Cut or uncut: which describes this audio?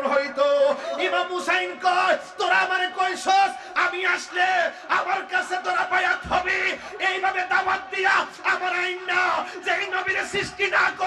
uncut